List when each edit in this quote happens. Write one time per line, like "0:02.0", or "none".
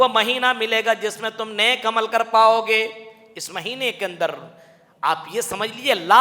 none